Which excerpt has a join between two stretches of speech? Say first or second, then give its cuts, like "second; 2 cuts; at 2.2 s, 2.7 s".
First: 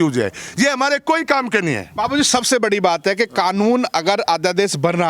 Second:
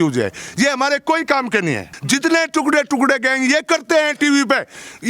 second; 1 cut; at 1.9 s